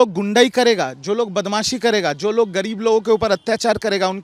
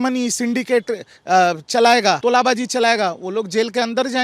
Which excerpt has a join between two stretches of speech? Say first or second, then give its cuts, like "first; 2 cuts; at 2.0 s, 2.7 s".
second; 1 cut; at 2.2 s